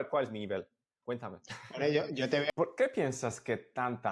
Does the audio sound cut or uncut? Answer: cut